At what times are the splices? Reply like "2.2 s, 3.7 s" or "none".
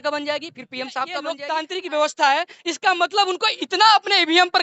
1.3 s